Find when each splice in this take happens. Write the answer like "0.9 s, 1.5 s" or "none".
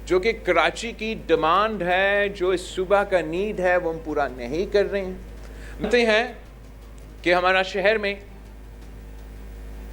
5.8 s